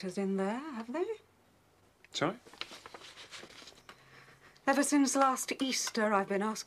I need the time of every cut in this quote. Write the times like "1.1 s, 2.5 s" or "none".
1.2 s